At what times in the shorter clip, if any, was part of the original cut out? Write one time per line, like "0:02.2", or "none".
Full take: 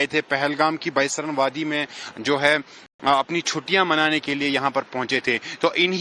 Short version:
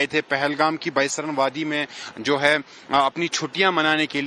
0:02.7